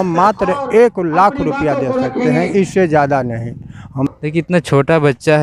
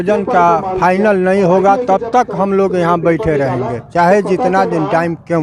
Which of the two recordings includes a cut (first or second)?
first